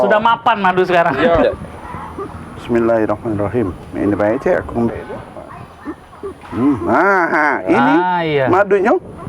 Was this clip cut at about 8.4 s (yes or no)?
no